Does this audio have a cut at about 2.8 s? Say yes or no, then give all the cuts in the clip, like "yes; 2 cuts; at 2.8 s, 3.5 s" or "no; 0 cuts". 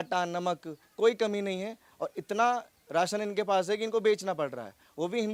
no; 0 cuts